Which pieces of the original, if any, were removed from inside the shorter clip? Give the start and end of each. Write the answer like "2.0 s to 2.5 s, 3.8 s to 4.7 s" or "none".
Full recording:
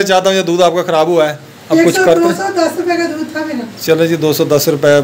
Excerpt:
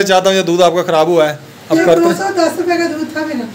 1.8 s to 2.0 s

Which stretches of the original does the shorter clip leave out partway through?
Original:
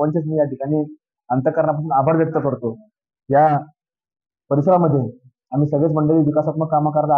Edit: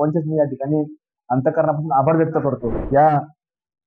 2.7 s to 3.1 s

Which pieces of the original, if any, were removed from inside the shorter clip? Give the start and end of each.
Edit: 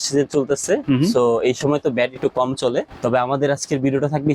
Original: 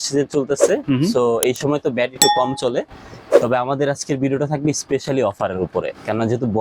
3.0 s to 3.4 s

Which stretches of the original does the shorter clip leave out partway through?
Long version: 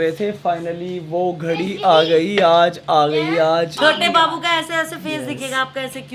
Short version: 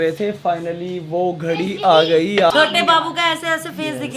2.5 s to 3.8 s

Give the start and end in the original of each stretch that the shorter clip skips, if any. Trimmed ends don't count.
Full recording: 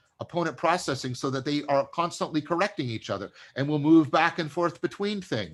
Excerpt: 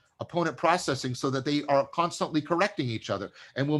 none

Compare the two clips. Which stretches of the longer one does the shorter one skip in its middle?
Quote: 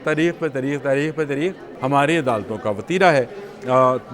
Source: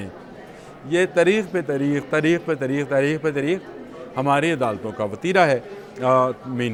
3.7 s to 4.0 s

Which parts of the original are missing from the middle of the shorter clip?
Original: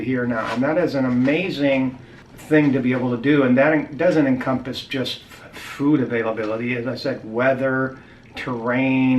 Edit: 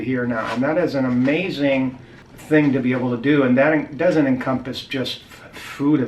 none

